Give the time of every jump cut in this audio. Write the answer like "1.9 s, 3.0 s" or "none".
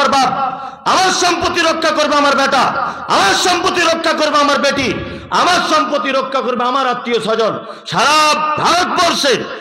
none